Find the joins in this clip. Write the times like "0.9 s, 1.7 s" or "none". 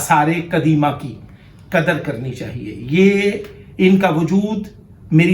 none